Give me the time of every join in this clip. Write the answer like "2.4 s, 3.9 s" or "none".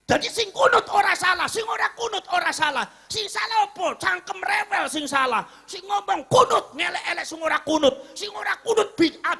none